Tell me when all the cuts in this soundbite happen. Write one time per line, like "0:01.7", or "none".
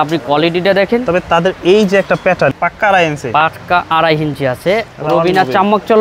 0:02.5
0:04.9

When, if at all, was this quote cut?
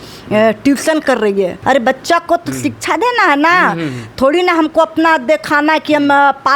0:01.6

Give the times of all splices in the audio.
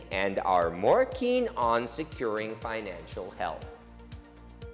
0:03.6

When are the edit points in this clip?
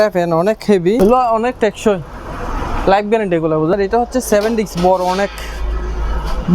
0:01.0
0:03.7

